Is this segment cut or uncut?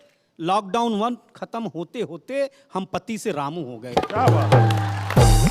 uncut